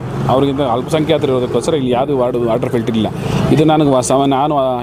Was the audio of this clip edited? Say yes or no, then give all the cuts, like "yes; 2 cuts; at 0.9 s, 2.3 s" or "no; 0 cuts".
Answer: no; 0 cuts